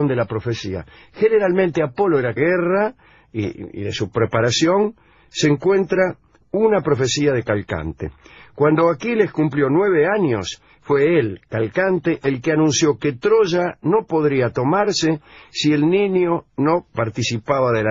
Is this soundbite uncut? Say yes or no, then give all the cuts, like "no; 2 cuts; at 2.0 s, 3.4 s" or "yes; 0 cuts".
yes; 0 cuts